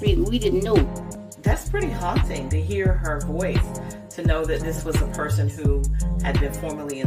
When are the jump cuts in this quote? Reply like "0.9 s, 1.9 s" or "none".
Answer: none